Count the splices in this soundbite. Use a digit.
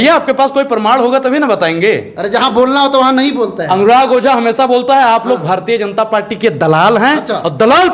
0